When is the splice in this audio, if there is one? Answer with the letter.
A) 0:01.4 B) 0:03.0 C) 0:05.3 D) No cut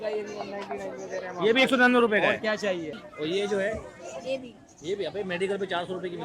B